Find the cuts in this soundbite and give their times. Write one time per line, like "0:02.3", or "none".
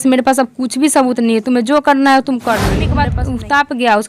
0:03.0

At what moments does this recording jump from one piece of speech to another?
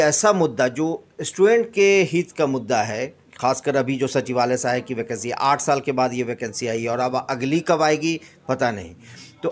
none

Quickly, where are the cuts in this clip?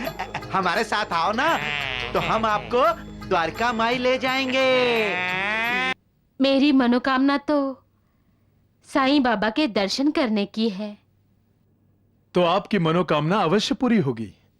0:05.9

